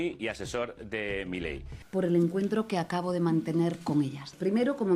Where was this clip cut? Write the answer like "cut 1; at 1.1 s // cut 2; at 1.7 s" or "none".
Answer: cut 1; at 1.8 s